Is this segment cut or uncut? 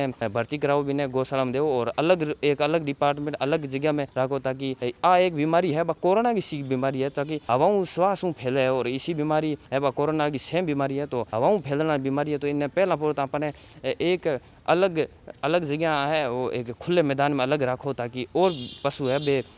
uncut